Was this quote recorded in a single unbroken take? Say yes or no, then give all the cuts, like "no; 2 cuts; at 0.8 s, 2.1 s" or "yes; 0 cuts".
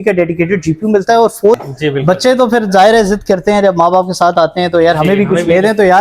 no; 1 cut; at 1.6 s